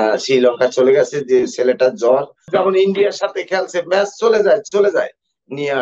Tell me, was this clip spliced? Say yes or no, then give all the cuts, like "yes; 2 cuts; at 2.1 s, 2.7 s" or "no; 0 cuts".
yes; 1 cut; at 2.5 s